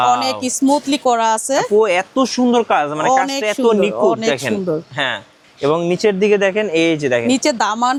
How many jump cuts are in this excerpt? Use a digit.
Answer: 0